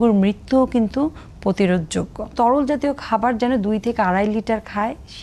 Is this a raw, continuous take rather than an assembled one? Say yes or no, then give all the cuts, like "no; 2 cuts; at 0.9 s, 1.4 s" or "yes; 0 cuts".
no; 1 cut; at 2.3 s